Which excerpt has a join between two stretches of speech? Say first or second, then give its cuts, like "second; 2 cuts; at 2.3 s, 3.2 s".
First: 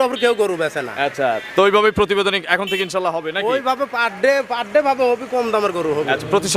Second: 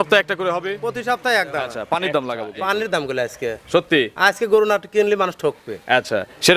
second; 1 cut; at 1.8 s